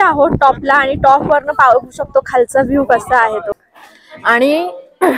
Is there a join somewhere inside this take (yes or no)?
yes